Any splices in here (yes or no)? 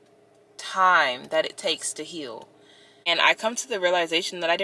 yes